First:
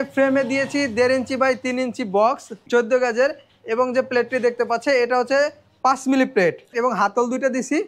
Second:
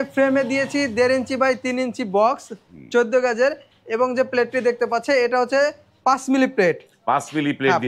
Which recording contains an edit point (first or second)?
first